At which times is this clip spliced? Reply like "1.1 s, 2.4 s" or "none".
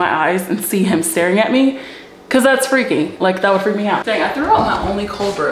4.0 s

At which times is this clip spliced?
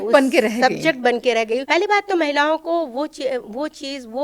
1.6 s

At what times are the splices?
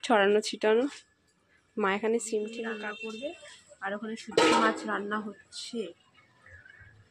2.7 s

